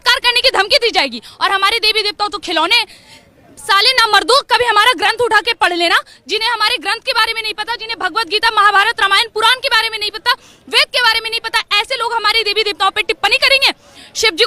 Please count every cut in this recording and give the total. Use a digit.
0